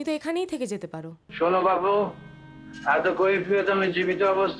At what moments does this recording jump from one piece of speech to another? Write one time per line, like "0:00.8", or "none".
0:01.2